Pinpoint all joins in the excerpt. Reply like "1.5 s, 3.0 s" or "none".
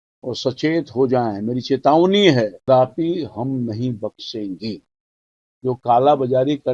2.7 s